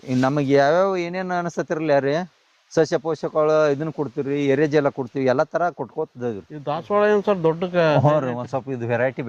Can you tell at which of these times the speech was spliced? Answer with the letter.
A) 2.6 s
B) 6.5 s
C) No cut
B